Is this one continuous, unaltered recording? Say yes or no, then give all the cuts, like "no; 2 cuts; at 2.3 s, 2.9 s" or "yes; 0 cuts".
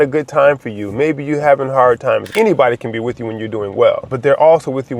no; 2 cuts; at 2.3 s, 4.1 s